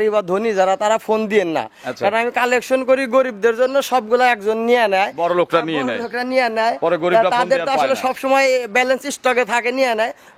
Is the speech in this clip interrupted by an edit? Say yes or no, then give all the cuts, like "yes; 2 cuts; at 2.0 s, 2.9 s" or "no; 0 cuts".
no; 0 cuts